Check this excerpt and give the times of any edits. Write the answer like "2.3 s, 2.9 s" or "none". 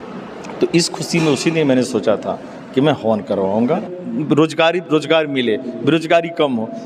4.0 s